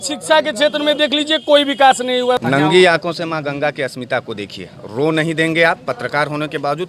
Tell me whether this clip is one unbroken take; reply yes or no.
no